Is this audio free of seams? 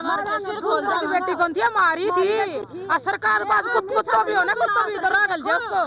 yes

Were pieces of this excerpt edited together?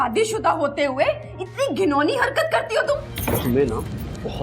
yes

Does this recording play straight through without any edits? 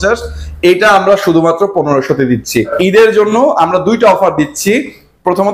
no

